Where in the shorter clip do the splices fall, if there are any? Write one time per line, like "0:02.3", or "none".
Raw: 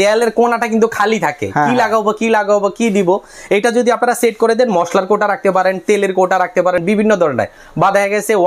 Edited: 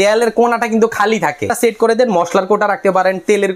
0:01.5